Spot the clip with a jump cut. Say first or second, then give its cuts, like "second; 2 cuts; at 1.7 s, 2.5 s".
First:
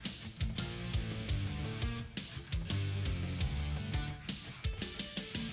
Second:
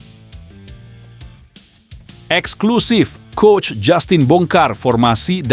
second; 1 cut; at 2.3 s